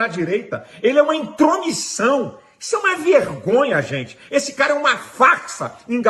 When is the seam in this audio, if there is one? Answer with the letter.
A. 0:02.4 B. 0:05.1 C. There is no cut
C